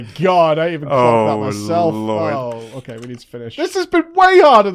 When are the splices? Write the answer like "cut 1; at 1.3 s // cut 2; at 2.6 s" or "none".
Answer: cut 1; at 3.5 s